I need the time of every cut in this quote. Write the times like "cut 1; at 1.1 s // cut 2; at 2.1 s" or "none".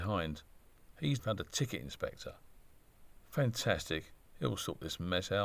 cut 1; at 1.2 s